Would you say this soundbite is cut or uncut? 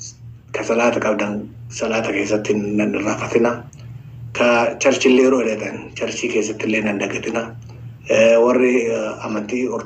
uncut